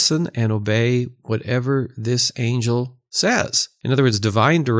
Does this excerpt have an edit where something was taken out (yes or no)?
yes